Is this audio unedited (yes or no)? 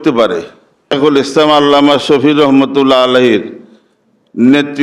no